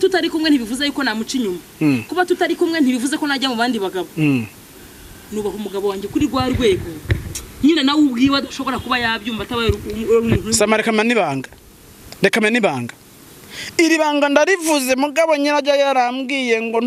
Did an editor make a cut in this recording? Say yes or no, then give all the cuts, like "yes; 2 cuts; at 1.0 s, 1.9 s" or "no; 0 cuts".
no; 0 cuts